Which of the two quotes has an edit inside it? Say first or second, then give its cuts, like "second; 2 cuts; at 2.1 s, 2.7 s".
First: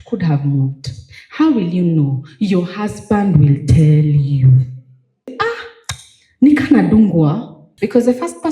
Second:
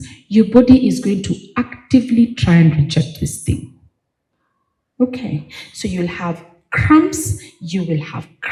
first; 2 cuts; at 5.3 s, 7.6 s